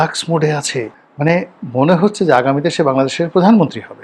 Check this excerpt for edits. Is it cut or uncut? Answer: cut